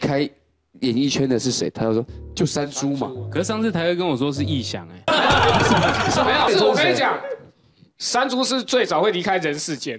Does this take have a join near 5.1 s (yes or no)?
yes